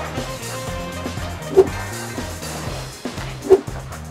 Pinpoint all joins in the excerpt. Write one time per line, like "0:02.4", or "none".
none